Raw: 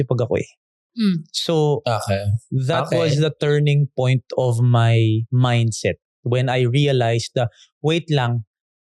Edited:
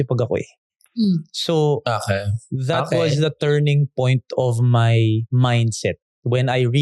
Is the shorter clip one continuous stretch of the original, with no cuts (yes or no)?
yes